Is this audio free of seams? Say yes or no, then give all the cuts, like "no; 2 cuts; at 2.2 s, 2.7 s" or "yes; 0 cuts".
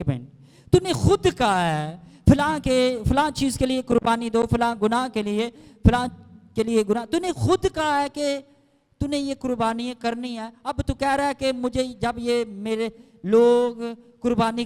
yes; 0 cuts